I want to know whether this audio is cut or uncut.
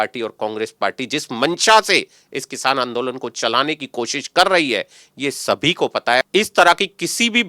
cut